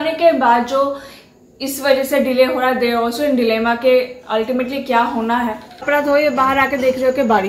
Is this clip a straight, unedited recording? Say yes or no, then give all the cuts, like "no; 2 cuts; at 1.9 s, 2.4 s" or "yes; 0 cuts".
no; 1 cut; at 5.8 s